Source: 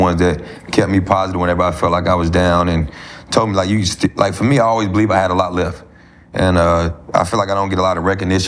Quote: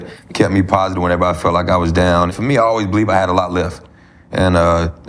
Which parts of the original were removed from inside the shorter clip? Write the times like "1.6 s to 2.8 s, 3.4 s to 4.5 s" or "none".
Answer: 3.0 s to 4.6 s

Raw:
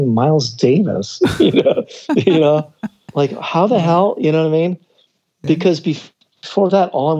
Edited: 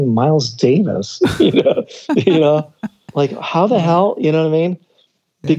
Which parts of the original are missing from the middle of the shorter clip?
none

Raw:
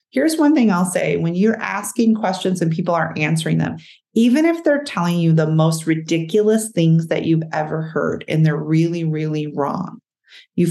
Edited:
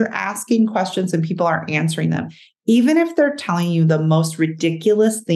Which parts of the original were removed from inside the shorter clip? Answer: none

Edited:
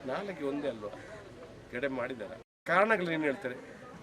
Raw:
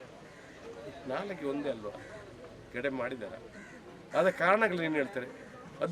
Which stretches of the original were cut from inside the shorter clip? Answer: 3.7 s to 4.4 s

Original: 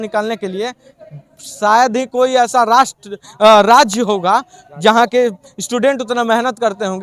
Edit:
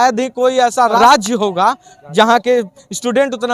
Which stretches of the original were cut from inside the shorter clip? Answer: 2.8 s to 3.7 s

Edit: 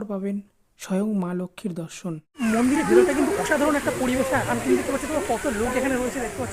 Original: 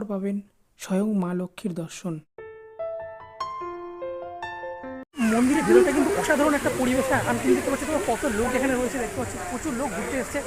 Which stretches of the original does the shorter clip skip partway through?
2.3 s to 5.1 s

